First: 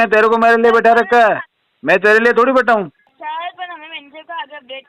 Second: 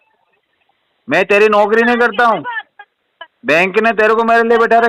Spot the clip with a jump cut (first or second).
first